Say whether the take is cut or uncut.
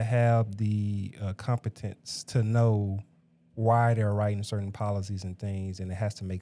uncut